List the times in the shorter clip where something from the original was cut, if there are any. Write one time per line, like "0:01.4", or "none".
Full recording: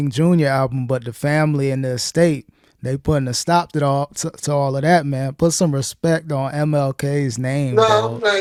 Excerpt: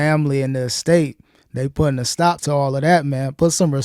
0:02.4